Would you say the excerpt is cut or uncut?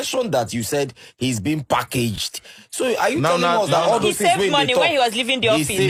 uncut